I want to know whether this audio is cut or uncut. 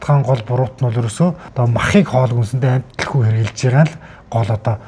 cut